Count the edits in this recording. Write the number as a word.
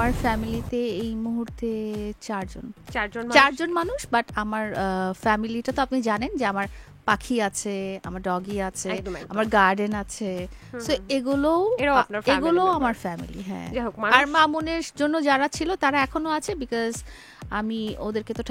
zero